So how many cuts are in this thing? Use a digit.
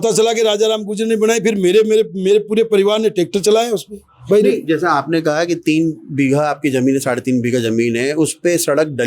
0